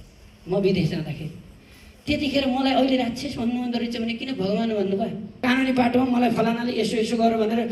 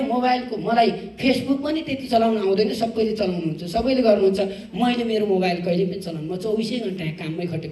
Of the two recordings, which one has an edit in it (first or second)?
first